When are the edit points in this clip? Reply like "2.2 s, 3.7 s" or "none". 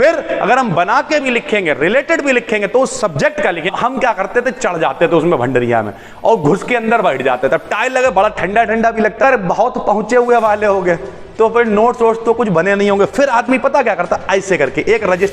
3.7 s, 9.2 s